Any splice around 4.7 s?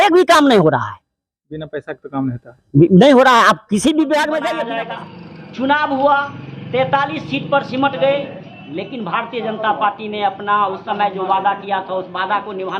yes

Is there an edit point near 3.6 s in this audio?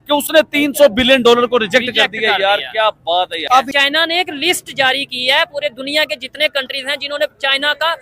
yes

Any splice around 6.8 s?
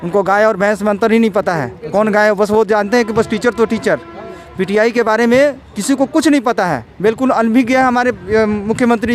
no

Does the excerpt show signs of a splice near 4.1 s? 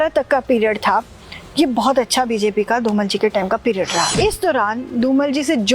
yes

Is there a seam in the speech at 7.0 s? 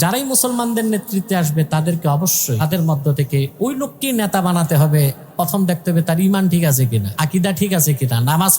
yes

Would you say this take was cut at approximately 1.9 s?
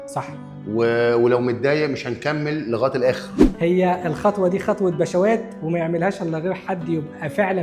no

